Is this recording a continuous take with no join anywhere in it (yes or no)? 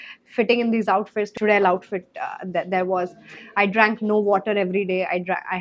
no